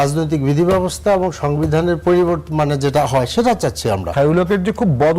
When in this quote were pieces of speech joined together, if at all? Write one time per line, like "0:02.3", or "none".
0:04.1